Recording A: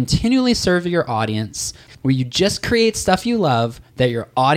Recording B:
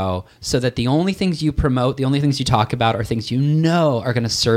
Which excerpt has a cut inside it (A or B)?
A